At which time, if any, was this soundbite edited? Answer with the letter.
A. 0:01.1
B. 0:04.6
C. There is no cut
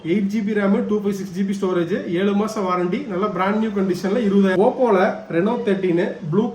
B